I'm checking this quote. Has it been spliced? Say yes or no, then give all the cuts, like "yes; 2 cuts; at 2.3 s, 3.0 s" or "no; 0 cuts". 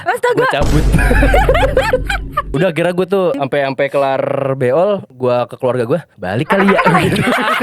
yes; 4 cuts; at 2.4 s, 3.4 s, 5.1 s, 6.2 s